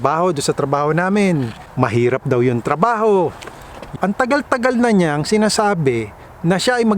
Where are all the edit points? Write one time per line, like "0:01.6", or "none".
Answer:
0:01.6
0:03.9